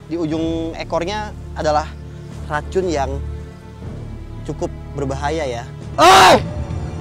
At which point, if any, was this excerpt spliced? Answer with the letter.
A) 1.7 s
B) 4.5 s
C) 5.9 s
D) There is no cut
C